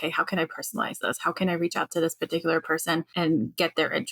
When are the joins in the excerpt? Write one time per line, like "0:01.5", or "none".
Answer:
0:03.1